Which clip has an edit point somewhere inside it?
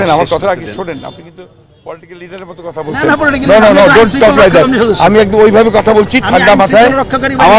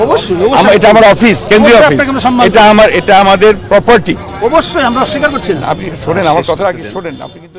second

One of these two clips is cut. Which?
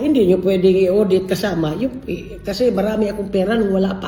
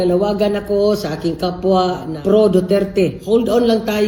second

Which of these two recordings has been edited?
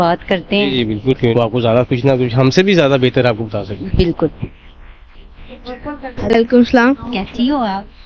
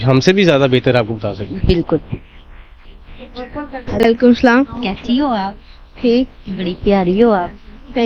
first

